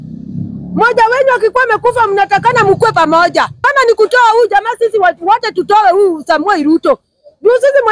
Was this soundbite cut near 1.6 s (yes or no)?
no